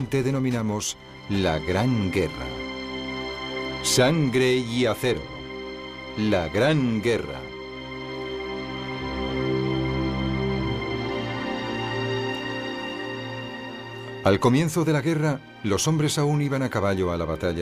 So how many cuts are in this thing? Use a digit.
1